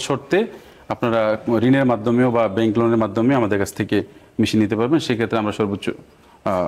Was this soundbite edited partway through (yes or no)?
no